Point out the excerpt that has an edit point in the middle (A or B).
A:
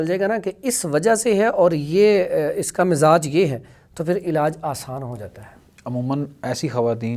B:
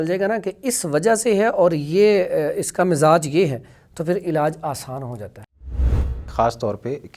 B